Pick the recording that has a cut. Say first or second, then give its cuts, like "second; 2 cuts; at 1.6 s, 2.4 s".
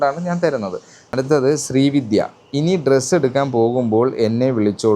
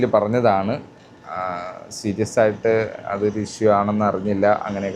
first; 1 cut; at 1.1 s